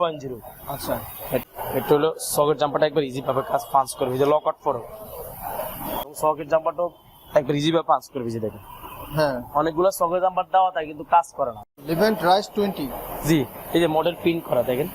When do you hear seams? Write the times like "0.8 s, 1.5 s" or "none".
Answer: 1.5 s, 6.1 s, 11.7 s